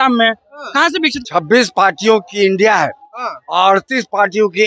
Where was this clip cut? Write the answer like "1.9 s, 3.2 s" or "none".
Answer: 1.2 s